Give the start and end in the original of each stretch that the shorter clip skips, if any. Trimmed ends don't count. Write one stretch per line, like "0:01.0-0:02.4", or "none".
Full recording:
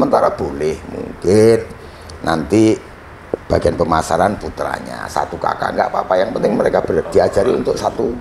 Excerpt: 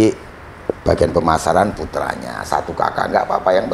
none